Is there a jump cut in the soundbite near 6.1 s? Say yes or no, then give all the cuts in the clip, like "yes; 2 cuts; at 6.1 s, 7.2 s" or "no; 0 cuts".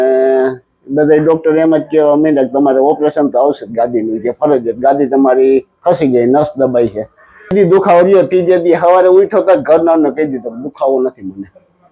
no; 1 cut; at 7.5 s